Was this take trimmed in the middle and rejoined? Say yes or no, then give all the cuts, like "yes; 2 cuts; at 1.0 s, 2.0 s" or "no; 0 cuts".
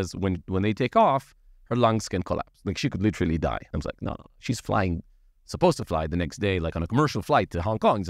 yes; 1 cut; at 3.7 s